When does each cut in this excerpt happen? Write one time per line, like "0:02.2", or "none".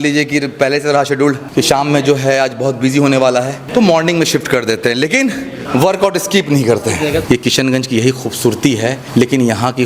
0:01.4
0:03.6
0:05.5
0:07.2
0:09.0